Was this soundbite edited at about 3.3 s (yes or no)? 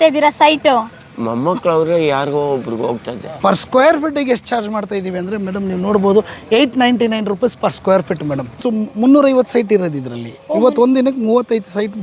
yes